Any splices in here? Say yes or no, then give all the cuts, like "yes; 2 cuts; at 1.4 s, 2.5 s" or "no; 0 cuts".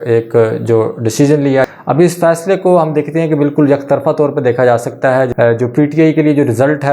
yes; 2 cuts; at 1.7 s, 5.3 s